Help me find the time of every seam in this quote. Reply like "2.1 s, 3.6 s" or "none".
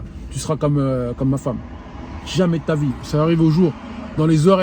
3.0 s